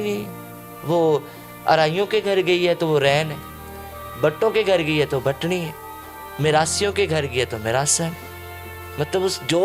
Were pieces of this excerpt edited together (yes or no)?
no